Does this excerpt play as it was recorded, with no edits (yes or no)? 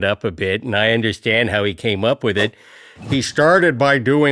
yes